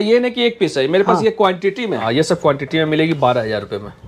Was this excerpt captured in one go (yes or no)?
no